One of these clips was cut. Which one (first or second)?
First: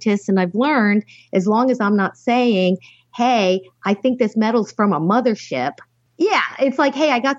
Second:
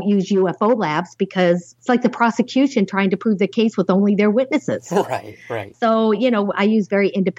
second